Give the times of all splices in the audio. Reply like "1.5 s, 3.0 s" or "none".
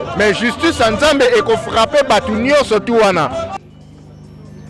3.5 s